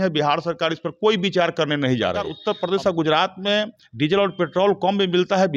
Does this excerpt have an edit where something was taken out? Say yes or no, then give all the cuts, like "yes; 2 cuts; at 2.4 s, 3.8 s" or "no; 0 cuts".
yes; 1 cut; at 2.3 s